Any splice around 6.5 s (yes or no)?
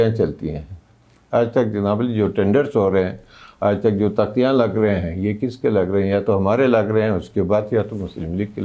no